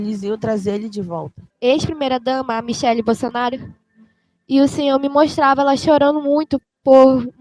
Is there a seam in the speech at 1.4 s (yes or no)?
yes